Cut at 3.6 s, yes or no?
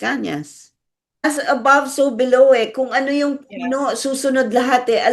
no